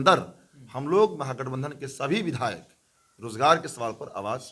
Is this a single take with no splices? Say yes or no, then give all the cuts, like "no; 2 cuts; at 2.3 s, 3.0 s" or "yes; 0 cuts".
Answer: yes; 0 cuts